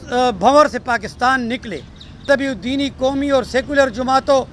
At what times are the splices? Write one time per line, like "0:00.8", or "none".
0:02.3